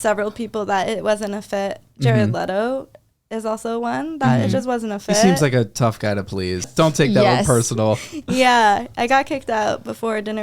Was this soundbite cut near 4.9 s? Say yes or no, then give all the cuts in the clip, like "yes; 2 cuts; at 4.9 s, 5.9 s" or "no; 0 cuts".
no; 1 cut; at 6.7 s